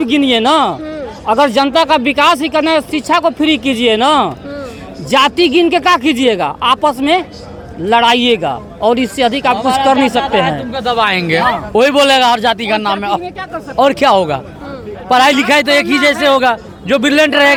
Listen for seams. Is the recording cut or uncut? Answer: uncut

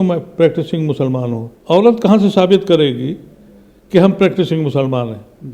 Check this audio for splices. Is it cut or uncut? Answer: cut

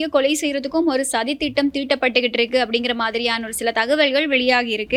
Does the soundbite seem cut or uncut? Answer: uncut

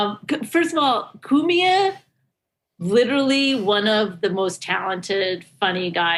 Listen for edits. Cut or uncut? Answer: uncut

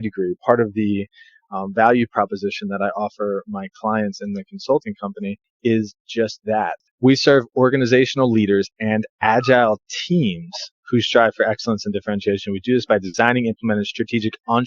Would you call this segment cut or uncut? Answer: cut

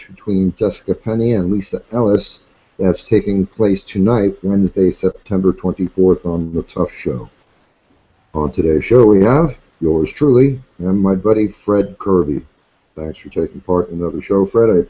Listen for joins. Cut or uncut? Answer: uncut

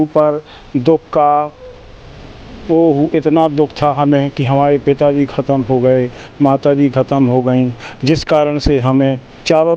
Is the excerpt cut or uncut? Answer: uncut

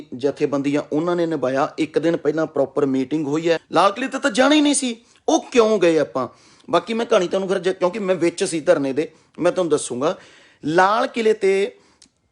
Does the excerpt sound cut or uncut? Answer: cut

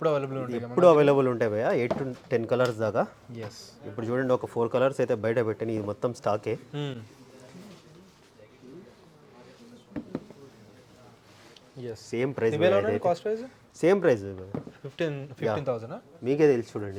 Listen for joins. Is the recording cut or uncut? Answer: uncut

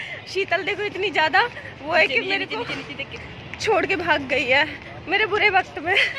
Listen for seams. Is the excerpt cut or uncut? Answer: uncut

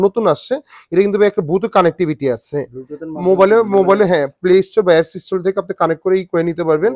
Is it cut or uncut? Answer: uncut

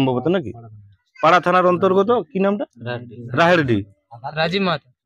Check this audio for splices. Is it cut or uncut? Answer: uncut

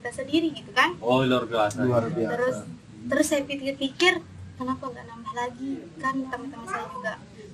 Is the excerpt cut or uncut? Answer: cut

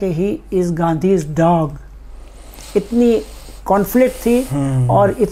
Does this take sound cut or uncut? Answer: uncut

